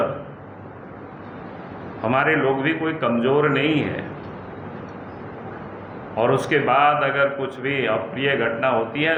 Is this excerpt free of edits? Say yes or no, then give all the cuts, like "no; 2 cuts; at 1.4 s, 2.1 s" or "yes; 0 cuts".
yes; 0 cuts